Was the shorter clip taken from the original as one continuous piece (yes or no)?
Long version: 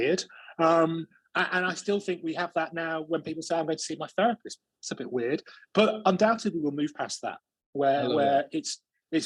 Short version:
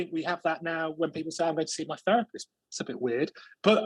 yes